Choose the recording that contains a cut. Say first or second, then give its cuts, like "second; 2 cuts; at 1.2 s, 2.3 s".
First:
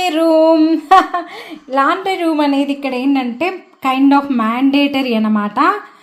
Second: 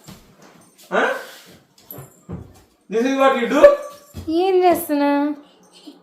second; 1 cut; at 4.0 s